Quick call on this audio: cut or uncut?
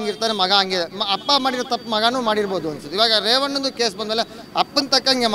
uncut